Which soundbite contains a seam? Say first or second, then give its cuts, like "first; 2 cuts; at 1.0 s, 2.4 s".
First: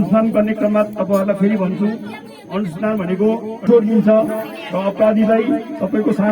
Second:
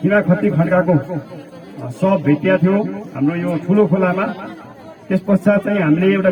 first; 1 cut; at 3.6 s